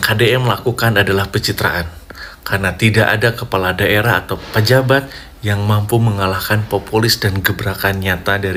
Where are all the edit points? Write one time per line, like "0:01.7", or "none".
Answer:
none